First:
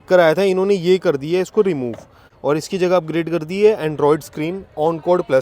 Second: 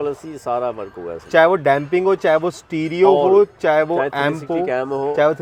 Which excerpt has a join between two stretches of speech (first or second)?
first